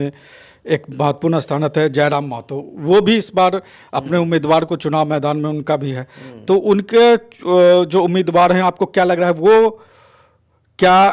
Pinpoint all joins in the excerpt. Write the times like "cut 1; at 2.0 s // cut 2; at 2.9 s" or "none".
none